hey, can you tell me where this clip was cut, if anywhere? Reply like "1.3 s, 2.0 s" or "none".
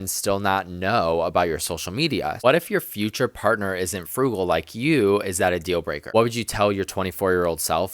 2.4 s, 6.0 s